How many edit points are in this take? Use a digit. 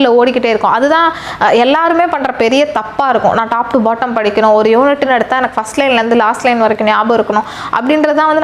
0